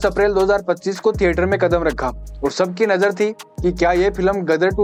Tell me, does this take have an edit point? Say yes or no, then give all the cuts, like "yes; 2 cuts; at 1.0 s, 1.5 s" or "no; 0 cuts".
no; 0 cuts